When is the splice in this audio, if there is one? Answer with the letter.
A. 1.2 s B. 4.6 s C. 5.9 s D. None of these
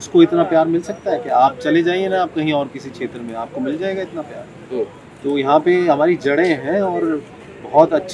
D